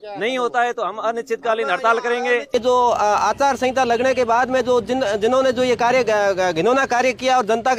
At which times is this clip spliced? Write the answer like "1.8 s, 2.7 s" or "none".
2.5 s